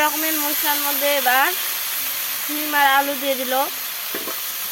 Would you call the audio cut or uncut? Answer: uncut